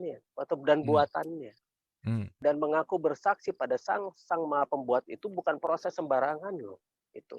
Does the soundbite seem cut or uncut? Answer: cut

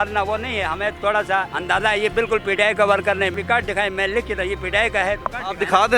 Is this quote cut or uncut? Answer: cut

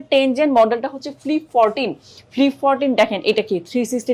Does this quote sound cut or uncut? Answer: uncut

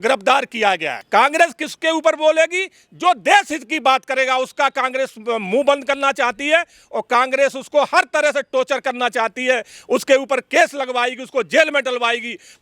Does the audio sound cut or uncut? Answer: cut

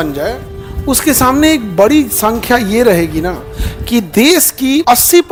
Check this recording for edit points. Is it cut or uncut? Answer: uncut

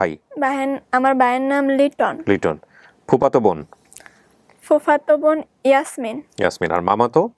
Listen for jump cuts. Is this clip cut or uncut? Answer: uncut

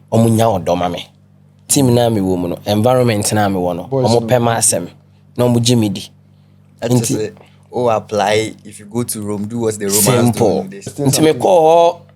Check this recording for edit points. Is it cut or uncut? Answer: cut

